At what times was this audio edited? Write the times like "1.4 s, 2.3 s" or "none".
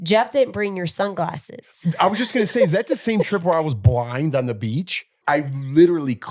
5.1 s